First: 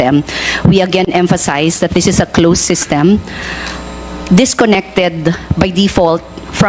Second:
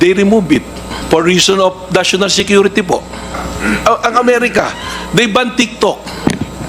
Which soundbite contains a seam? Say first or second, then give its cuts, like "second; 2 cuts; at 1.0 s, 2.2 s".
second; 2 cuts; at 1.0 s, 3.4 s